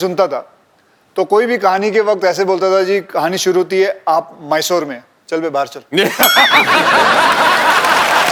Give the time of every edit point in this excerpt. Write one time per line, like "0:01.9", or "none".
none